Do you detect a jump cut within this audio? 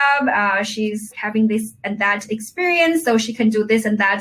yes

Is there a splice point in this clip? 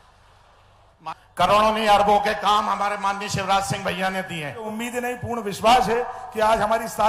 yes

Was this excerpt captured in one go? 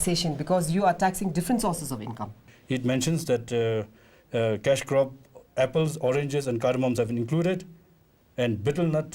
no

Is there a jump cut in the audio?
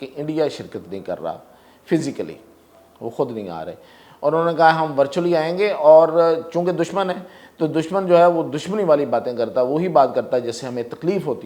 no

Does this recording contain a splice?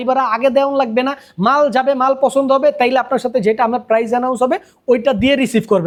no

